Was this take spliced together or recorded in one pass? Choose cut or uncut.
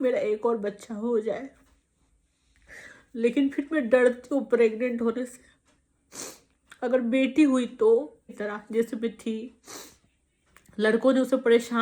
cut